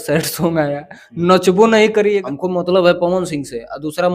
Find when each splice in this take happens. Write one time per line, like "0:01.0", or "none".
0:02.2